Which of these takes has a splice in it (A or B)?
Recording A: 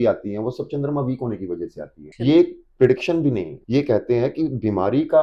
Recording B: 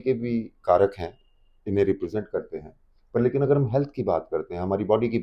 A